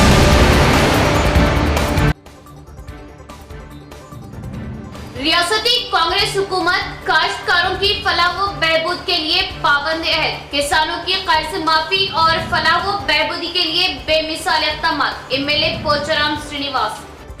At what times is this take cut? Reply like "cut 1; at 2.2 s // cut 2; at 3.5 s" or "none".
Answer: cut 1; at 3.1 s